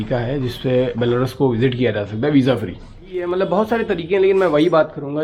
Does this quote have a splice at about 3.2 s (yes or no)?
yes